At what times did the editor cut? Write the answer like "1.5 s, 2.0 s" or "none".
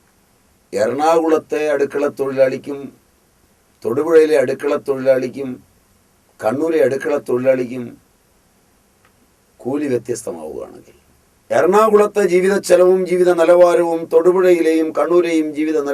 11.4 s

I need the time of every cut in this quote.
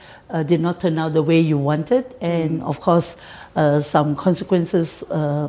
none

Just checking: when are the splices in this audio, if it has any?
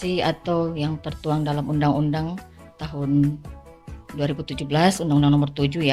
none

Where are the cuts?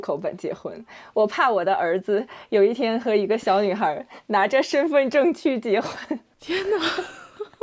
none

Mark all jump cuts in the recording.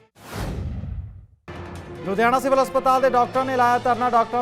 2.0 s

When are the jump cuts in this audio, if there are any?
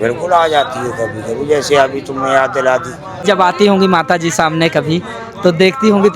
3.2 s

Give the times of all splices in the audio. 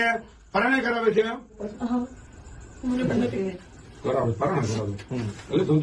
1.7 s

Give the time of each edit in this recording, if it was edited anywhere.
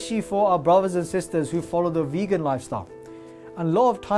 3.1 s

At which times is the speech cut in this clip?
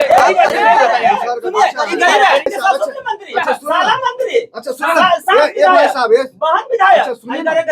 2.5 s

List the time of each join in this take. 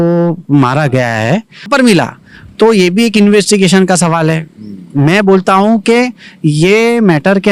1.7 s

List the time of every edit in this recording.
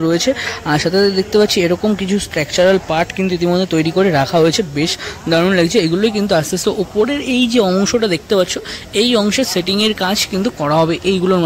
none

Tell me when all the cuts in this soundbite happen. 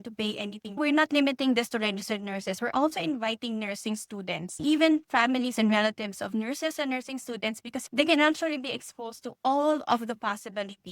0.8 s, 4.6 s, 7.7 s

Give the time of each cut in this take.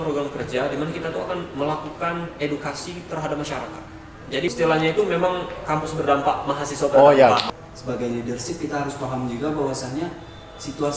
4.5 s, 7.4 s

